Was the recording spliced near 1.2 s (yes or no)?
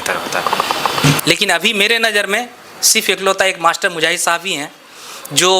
yes